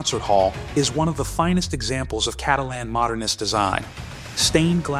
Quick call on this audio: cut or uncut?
uncut